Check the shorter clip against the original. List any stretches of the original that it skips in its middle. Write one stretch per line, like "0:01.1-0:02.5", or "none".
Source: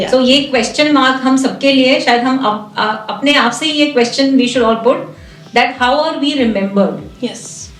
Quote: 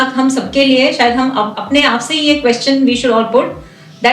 0:02.6-0:03.1

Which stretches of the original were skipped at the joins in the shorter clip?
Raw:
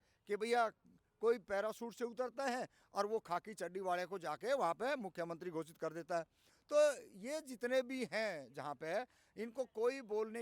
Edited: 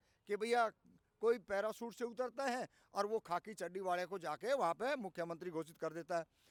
none

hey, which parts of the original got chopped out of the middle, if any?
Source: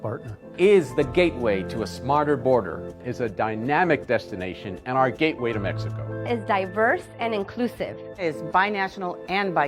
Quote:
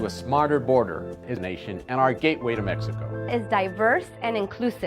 0:03.1-0:04.3

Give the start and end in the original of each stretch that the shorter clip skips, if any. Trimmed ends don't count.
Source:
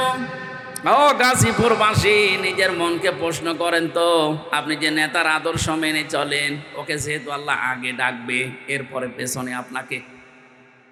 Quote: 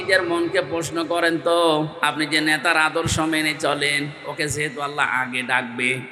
none

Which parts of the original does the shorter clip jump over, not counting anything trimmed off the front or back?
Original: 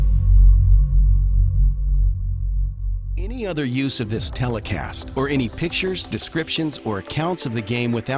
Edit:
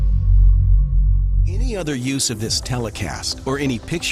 0:01.4-0:03.1

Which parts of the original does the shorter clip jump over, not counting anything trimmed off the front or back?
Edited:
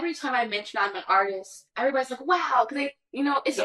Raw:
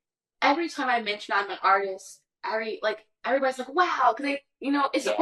0:02.2-0:03.1

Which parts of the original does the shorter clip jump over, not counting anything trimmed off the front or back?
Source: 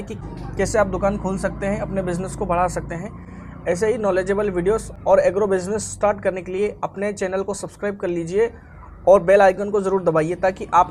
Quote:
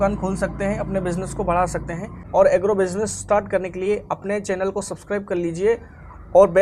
0:03.2-0:04.9

